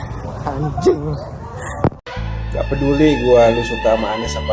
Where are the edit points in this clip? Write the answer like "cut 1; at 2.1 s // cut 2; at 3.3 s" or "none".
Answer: none

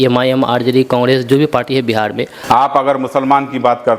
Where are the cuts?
cut 1; at 2.3 s

